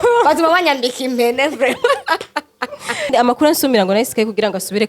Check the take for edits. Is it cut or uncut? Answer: cut